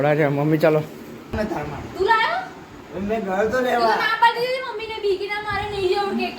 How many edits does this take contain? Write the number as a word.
one